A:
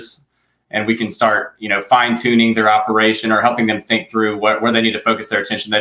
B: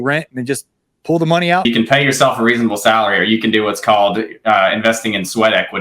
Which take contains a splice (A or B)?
B